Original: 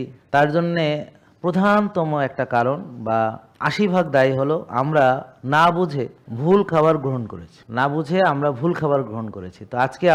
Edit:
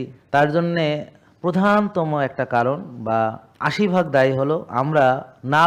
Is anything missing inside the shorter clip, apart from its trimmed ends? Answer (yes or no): no